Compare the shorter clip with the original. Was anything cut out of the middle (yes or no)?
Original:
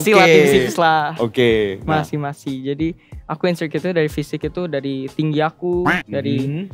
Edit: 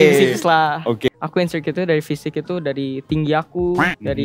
yes